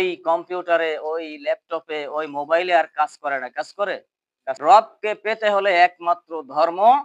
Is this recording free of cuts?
no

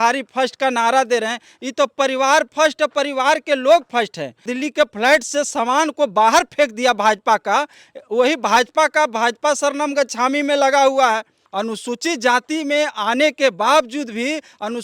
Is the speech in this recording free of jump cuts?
no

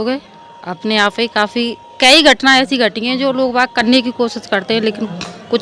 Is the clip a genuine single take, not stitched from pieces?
yes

